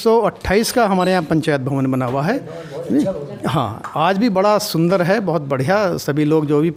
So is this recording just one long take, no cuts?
yes; 0 cuts

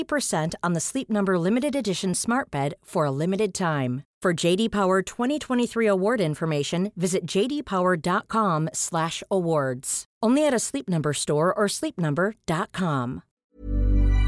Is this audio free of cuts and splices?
no; 1 cut; at 13.3 s

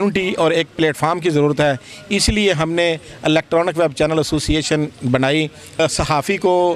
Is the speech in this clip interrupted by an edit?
yes; 1 cut; at 5.8 s

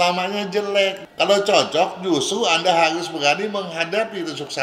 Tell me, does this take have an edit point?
yes; 1 cut; at 1.0 s

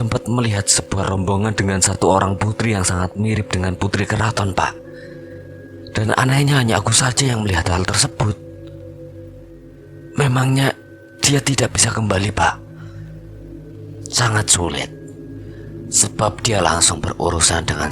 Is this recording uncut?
no; 1 cut; at 9.7 s

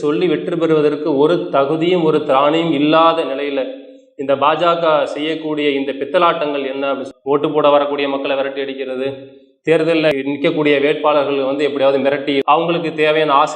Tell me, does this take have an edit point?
yes; 2 cuts; at 7.1 s, 12.4 s

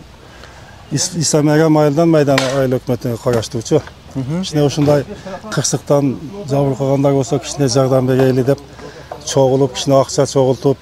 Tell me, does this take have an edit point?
no; 0 cuts

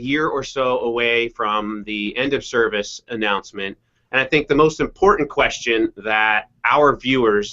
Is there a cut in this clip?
yes; 1 cut; at 3.5 s

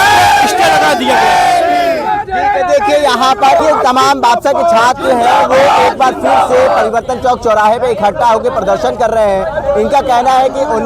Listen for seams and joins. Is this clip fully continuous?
yes; 0 cuts

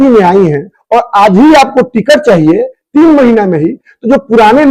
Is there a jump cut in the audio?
no; 0 cuts

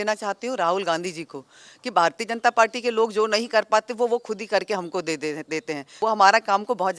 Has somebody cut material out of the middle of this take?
yes; 1 cut; at 5.8 s

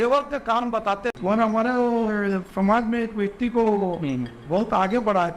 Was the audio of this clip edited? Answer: yes; 1 cut; at 1.1 s

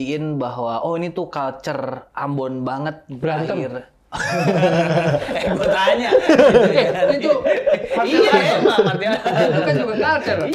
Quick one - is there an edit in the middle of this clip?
no; 0 cuts

